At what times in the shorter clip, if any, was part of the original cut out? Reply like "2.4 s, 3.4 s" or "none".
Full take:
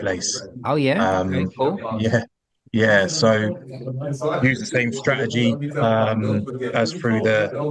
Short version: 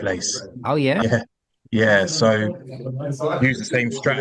1.0 s